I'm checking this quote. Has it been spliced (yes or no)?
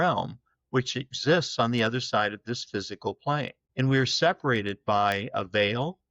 yes